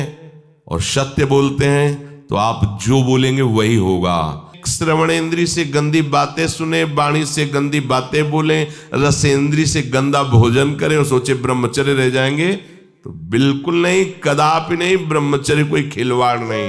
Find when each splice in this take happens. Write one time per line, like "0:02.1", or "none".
0:04.6